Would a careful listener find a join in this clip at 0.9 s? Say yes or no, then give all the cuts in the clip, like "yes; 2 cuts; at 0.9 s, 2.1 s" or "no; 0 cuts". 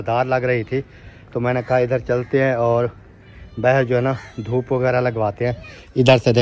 no; 0 cuts